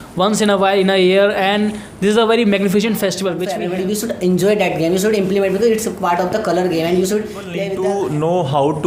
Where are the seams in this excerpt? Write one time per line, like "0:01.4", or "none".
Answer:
0:03.5
0:07.6